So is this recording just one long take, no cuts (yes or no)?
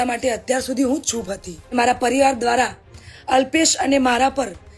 no